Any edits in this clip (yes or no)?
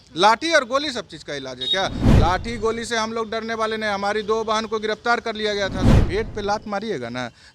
yes